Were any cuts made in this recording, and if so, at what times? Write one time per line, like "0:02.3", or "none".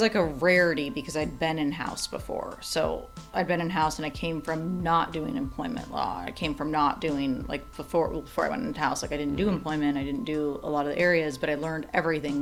none